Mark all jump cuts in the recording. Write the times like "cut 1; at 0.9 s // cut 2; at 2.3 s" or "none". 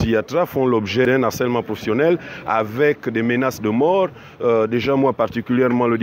cut 1; at 1.0 s